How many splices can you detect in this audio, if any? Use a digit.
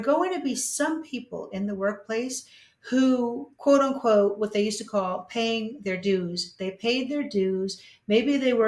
0